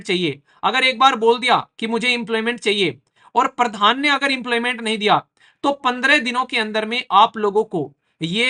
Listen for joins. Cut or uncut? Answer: uncut